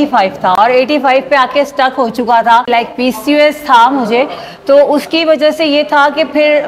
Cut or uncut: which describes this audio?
cut